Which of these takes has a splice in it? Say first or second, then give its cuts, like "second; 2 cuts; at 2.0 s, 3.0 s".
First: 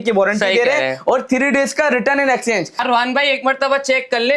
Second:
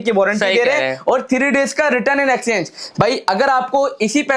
first; 1 cut; at 2.8 s